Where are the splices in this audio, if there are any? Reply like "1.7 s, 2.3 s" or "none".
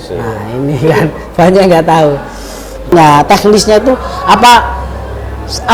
2.9 s